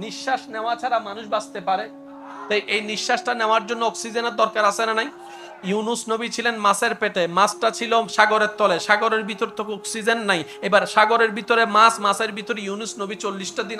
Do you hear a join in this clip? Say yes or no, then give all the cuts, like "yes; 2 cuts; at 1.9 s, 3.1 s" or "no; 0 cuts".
yes; 1 cut; at 2.4 s